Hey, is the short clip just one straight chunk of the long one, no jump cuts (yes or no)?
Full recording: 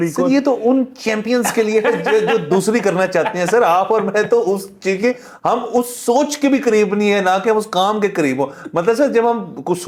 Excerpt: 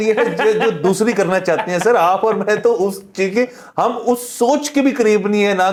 yes